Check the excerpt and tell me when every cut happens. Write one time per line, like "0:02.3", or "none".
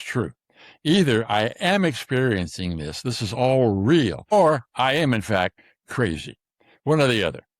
0:04.3